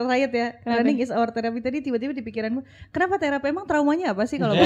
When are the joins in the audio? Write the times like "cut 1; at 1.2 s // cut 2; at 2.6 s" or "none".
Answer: none